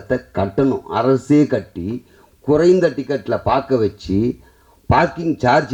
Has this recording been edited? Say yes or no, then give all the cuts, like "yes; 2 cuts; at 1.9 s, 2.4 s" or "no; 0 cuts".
no; 0 cuts